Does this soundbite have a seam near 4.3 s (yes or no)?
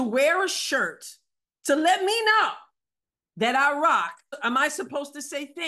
yes